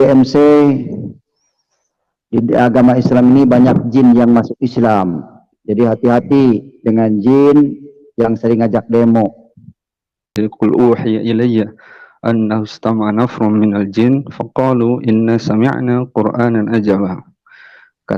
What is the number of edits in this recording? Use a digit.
1